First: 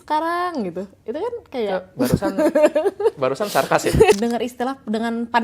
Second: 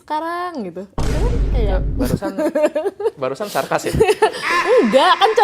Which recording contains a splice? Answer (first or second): first